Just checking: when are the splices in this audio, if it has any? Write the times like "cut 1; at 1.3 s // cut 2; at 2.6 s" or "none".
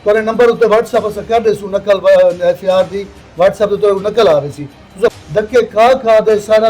cut 1; at 5.1 s